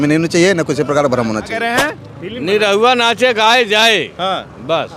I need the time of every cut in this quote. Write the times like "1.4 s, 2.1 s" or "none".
1.6 s

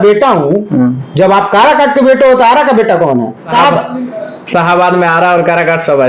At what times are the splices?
3.5 s

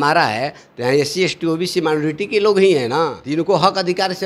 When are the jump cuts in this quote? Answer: 3.2 s

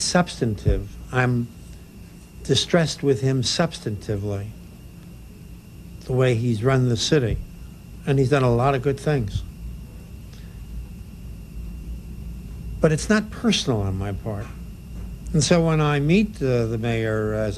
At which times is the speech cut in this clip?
15.5 s

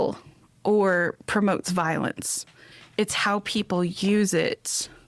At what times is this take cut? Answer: none

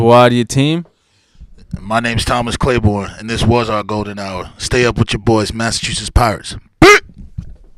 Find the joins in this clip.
none

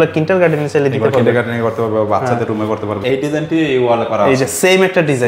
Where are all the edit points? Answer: 3.0 s

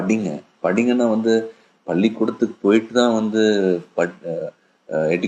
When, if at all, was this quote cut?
2.9 s

